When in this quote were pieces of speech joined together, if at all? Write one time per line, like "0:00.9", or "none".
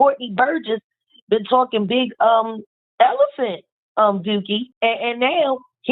0:02.8
0:04.7